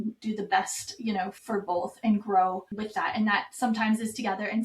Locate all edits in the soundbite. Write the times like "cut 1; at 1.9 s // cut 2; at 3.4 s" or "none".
cut 1; at 1.4 s // cut 2; at 2.7 s